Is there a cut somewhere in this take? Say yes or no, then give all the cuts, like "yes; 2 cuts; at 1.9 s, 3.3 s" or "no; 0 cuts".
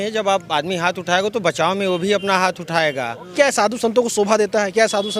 yes; 1 cut; at 3.2 s